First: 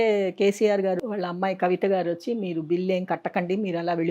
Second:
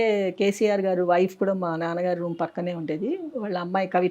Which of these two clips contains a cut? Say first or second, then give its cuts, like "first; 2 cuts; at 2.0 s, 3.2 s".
first; 1 cut; at 1.0 s